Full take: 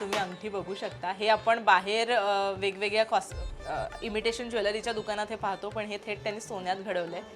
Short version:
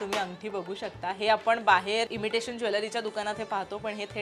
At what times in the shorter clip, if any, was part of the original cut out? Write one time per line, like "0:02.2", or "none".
0:02.1